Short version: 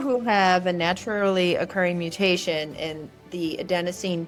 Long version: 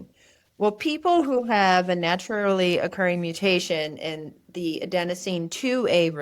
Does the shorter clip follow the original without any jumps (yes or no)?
yes